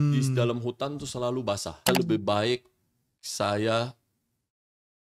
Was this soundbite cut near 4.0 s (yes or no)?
no